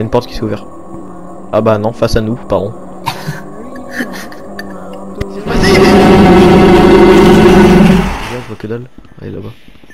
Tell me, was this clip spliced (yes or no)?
no